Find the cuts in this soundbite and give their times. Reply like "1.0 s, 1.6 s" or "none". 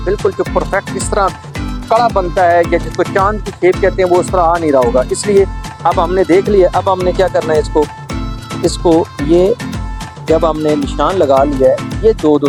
none